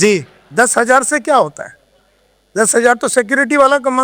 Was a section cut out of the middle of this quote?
no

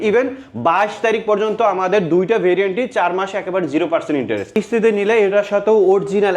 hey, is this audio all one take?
no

